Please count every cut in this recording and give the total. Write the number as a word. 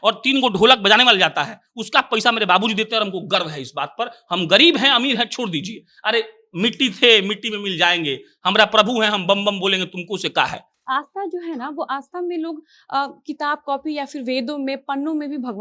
one